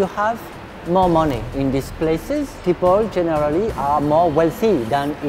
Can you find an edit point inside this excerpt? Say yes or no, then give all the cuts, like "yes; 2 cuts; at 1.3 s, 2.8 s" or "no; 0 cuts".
yes; 2 cuts; at 1.5 s, 2.5 s